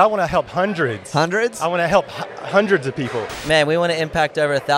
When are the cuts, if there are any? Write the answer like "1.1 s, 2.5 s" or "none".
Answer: 3.4 s